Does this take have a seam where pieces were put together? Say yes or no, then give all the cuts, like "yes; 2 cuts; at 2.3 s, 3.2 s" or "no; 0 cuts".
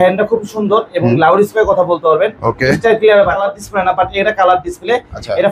yes; 1 cut; at 3.5 s